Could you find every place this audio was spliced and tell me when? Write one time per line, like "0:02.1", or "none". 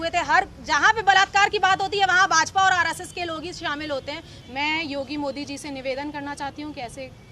0:04.3